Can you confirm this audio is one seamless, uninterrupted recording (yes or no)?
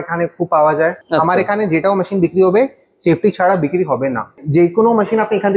no